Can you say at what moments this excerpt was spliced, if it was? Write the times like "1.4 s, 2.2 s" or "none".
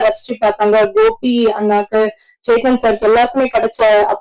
none